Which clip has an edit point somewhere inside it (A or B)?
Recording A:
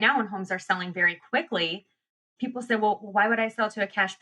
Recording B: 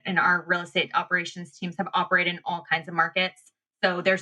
A